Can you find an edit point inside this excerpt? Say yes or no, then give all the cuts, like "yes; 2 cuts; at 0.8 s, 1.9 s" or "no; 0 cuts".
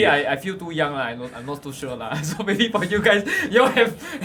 no; 0 cuts